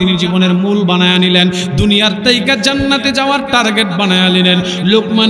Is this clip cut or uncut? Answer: uncut